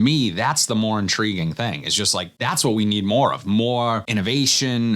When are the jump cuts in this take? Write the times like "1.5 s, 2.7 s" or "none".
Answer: 2.3 s, 4.0 s